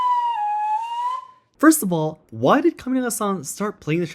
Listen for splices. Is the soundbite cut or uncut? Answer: cut